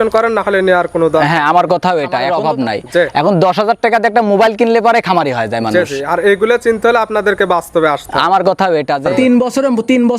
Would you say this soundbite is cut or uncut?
cut